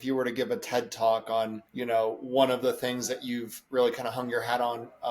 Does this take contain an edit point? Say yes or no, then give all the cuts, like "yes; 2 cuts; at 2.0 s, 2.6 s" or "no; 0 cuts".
yes; 1 cut; at 1.7 s